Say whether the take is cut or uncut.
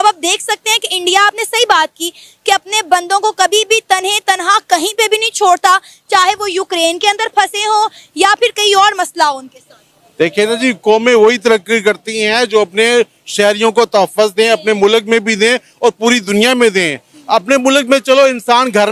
uncut